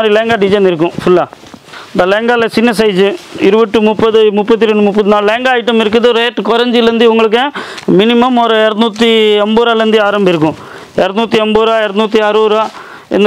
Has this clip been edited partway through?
no; 0 cuts

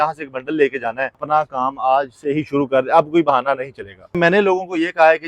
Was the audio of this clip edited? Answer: yes; 2 cuts; at 1.2 s, 4.1 s

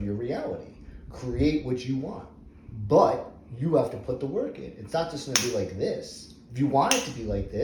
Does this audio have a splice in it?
no; 0 cuts

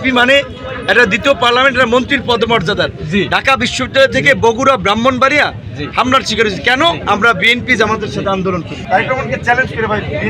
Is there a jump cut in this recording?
yes; 1 cut; at 8.7 s

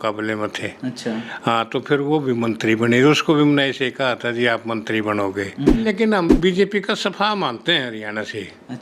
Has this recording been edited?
yes; 1 cut; at 5.8 s

